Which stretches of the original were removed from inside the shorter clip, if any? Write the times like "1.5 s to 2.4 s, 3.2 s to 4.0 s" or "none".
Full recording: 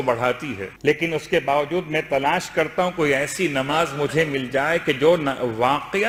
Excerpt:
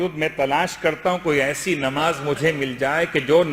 none